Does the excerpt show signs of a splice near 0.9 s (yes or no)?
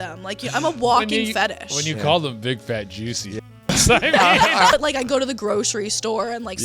no